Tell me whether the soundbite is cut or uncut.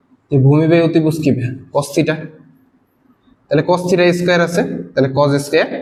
uncut